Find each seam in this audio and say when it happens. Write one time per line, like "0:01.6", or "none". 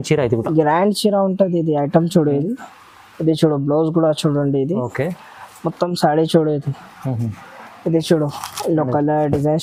none